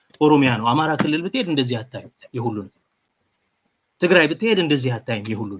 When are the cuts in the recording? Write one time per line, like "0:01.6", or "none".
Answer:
none